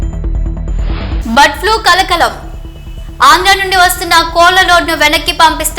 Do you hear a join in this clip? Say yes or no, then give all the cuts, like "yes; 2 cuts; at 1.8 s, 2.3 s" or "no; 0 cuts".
yes; 1 cut; at 1.0 s